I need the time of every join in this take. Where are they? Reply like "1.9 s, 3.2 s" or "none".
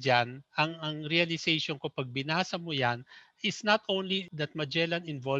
4.3 s